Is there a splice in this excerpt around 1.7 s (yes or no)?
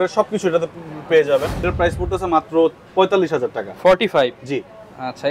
yes